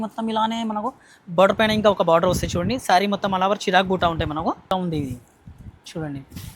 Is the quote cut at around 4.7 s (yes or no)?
yes